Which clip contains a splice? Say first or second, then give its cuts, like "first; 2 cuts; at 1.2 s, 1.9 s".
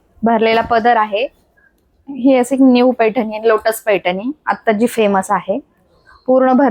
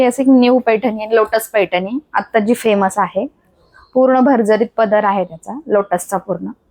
first; 1 cut; at 1.4 s